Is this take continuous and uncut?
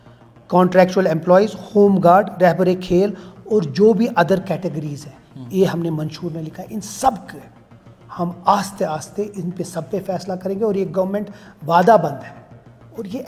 yes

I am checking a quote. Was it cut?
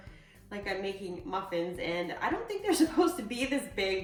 no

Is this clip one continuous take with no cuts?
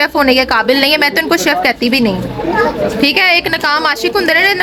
yes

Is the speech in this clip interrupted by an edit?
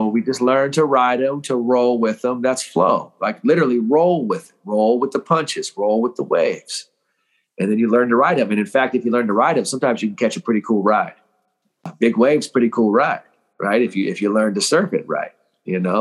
yes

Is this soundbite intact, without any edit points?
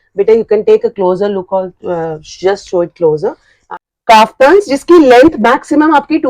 no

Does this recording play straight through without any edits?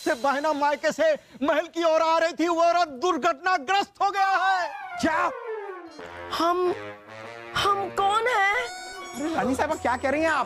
no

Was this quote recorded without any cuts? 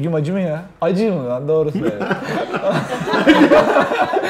yes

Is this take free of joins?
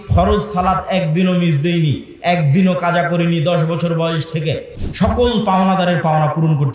no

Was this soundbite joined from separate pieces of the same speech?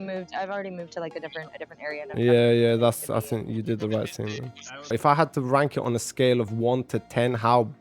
yes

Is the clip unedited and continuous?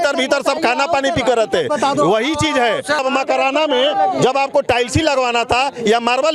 no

